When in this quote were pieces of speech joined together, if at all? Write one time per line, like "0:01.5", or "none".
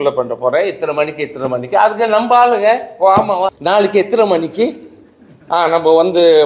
0:03.5